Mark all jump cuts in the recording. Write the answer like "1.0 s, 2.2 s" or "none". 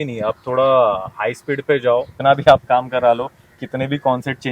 2.1 s